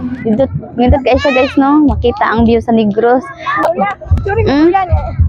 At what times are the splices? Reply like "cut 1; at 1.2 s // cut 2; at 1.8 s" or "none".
cut 1; at 3.6 s